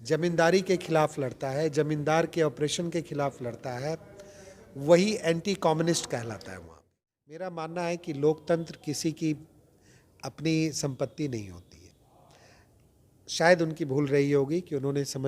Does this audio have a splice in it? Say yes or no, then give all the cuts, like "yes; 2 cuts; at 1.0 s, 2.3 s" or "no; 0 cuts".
yes; 1 cut; at 7.5 s